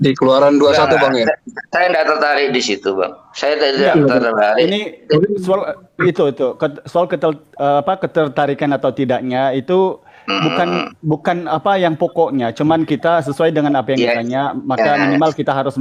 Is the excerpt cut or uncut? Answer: uncut